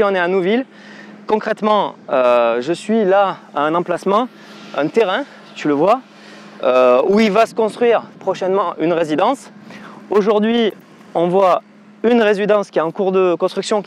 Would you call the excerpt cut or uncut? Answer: uncut